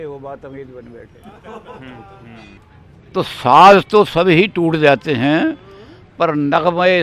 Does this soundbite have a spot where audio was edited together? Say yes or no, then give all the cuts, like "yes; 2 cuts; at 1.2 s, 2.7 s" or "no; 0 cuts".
yes; 1 cut; at 2.6 s